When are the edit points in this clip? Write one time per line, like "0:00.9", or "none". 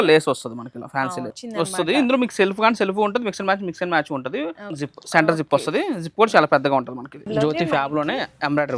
0:01.4
0:04.6
0:07.3